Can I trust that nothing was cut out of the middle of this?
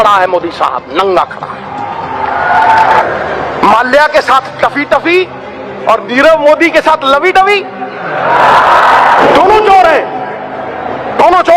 yes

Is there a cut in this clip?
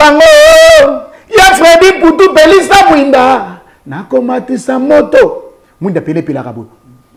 no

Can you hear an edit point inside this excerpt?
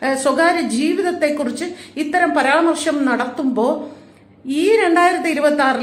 no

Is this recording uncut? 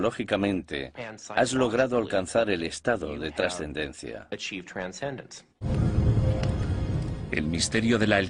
no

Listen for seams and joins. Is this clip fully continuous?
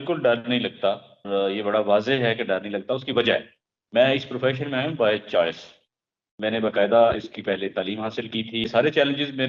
no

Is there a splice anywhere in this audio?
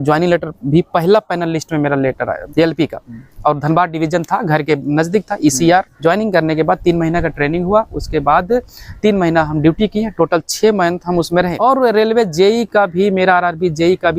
yes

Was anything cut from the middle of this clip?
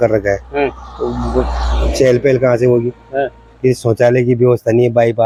no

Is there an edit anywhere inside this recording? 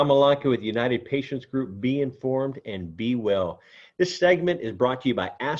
no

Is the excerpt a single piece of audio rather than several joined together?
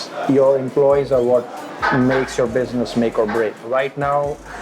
no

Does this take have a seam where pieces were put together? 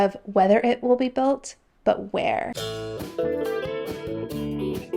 yes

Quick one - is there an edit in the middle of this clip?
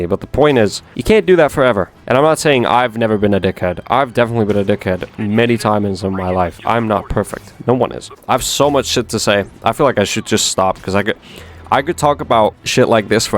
yes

